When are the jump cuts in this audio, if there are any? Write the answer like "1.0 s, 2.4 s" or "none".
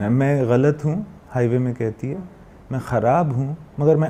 none